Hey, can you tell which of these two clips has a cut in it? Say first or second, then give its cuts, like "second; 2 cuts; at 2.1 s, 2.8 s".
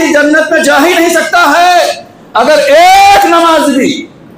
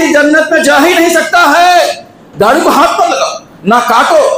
second; 1 cut; at 2.2 s